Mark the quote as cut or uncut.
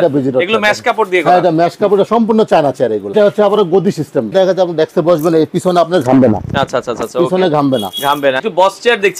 cut